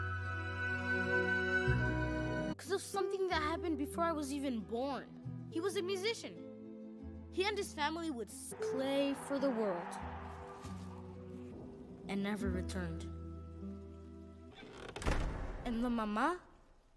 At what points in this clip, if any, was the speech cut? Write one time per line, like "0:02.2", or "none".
none